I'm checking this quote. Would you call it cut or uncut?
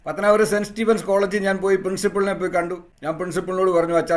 cut